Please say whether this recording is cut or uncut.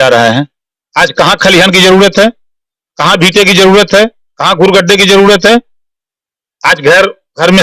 cut